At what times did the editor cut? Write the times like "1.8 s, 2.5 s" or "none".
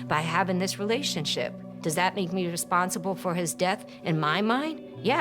1.7 s